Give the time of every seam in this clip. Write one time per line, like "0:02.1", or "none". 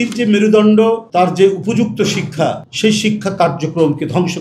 0:01.0
0:02.7